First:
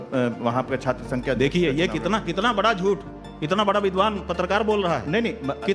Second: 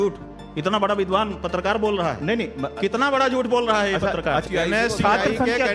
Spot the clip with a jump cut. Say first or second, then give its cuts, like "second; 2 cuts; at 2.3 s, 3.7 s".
second; 1 cut; at 4.5 s